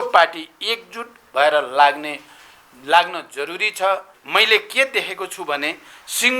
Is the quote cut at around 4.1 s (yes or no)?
yes